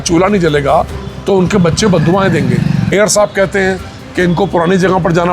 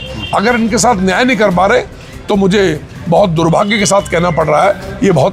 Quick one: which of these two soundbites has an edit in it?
first; 1 cut; at 2.9 s

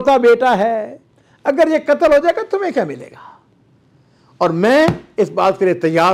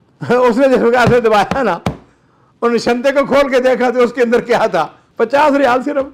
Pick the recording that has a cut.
second; 1 cut; at 5.0 s

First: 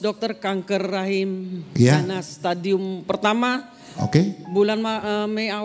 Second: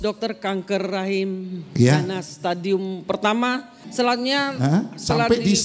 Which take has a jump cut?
second; 1 cut; at 3.8 s

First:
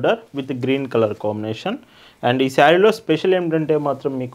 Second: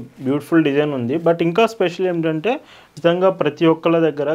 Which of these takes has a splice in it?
second; 1 cut; at 2.9 s

